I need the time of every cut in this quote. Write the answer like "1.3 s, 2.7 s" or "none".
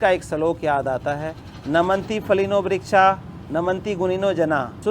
none